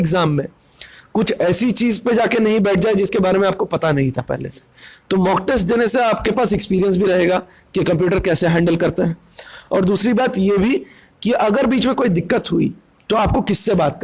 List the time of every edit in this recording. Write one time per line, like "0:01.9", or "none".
none